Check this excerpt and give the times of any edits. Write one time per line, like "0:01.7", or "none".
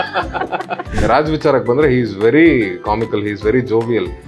0:01.0